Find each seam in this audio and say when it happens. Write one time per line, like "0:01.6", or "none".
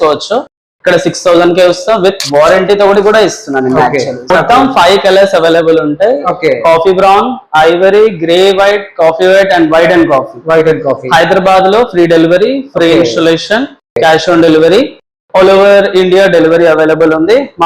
0:04.3